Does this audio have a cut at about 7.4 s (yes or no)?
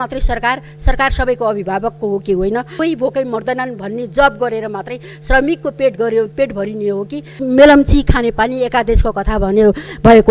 yes